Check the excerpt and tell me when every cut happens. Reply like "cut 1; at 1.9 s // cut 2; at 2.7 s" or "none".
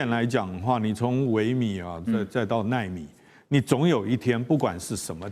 none